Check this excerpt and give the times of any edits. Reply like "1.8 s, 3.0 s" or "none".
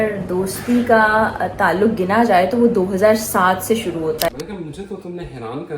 4.3 s